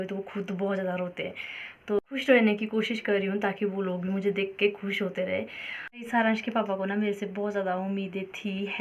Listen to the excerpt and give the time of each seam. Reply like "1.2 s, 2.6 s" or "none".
2.0 s, 5.9 s